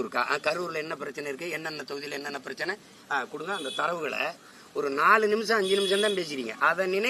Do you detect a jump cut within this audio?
no; 0 cuts

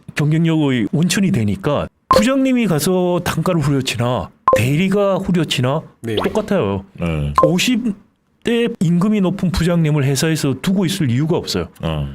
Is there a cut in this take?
yes; 3 cuts; at 0.9 s, 2.0 s, 8.7 s

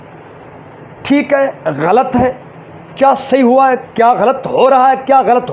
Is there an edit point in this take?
no; 0 cuts

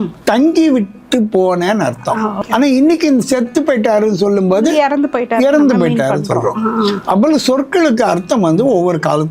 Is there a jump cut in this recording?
yes; 1 cut; at 2.4 s

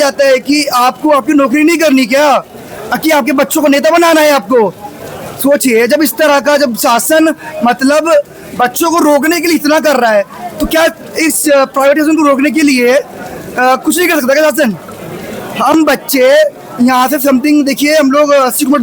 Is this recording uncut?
yes; 0 cuts

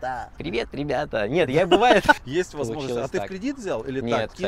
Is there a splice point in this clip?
yes; 1 cut; at 2.2 s

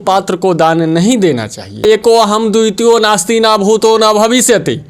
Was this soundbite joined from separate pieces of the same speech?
yes; 1 cut; at 1.8 s

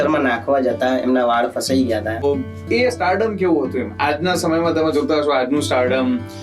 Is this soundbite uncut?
no; 1 cut; at 2.2 s

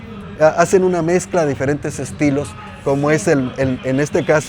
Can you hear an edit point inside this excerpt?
no; 0 cuts

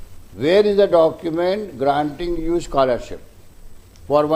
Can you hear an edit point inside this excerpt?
no; 0 cuts

